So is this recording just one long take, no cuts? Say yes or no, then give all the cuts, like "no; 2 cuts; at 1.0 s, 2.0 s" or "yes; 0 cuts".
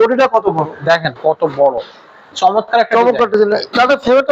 no; 1 cut; at 2.3 s